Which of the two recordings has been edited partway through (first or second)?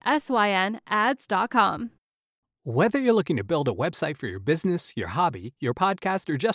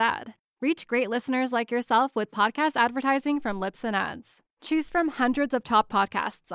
first